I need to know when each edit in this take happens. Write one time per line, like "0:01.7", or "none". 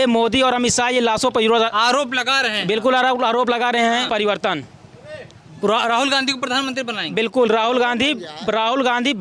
0:04.1